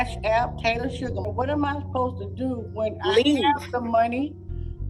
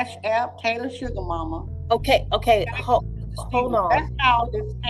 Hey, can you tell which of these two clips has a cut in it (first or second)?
first